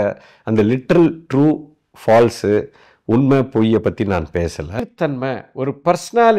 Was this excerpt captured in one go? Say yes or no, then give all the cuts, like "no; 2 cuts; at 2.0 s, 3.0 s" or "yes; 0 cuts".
no; 1 cut; at 4.8 s